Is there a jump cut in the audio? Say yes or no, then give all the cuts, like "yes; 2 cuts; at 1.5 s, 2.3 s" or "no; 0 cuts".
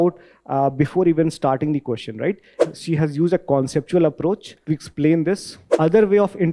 yes; 3 cuts; at 2.6 s, 4.5 s, 5.6 s